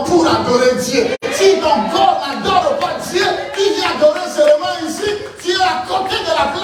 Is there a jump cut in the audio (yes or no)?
no